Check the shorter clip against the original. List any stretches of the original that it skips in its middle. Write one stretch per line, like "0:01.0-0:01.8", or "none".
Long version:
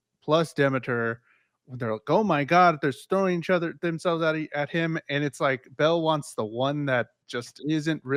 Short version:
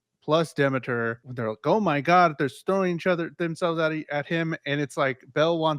0:01.2-0:01.7